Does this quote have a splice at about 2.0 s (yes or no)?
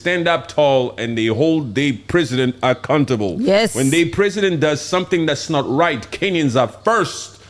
no